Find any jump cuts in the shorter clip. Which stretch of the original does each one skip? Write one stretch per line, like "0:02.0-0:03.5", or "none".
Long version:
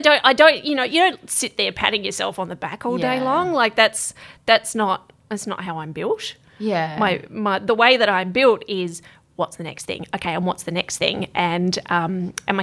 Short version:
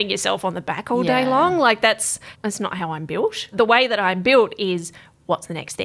0:04.2-0:05.2
0:06.4-0:07.6

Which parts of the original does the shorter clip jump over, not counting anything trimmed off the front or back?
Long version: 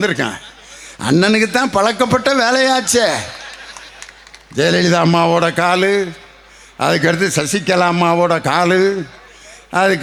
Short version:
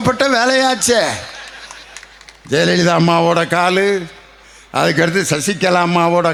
none

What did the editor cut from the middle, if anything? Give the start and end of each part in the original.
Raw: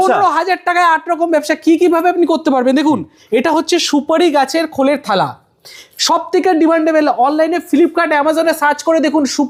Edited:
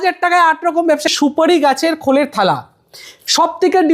0:01.6-0:03.9

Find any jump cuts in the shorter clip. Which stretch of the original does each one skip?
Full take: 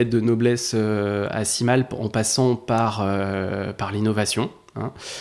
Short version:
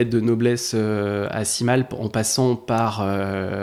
none

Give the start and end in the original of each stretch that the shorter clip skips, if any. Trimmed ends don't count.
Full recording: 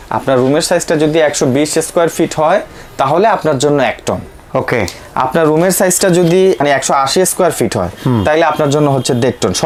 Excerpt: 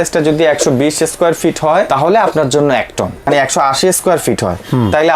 0:02.6-0:03.0
0:04.3-0:06.6

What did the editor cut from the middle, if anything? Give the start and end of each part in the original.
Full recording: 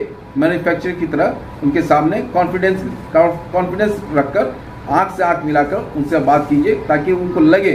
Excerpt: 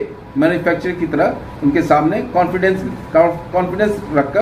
none

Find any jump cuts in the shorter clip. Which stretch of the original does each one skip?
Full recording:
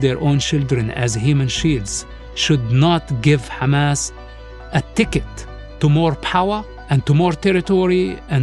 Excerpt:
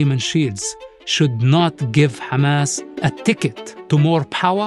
0:04.1-0:04.5
0:05.4-0:05.6

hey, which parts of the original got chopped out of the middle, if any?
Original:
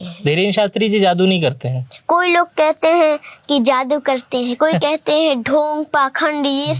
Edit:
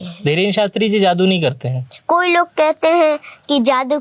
none

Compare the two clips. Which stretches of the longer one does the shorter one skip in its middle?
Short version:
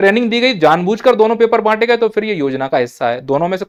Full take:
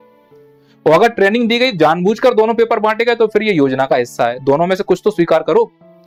none

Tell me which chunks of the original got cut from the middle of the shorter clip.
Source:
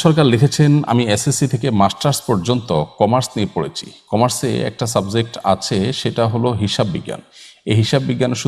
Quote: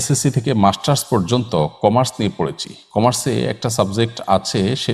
none

